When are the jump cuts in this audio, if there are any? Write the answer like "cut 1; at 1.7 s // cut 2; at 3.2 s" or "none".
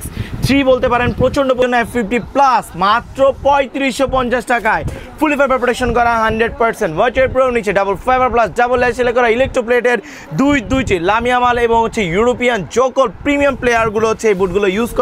cut 1; at 1.6 s